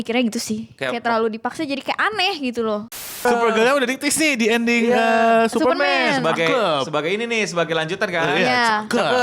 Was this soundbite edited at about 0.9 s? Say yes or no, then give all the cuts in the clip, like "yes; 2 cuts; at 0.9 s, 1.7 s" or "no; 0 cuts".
no; 1 cut; at 3.2 s